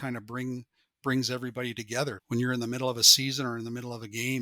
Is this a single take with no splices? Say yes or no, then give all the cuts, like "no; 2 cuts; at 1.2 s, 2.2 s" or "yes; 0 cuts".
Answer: no; 1 cut; at 2.2 s